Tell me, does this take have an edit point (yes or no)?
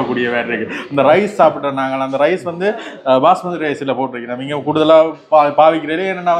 no